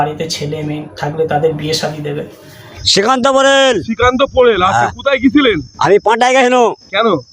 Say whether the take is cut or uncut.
cut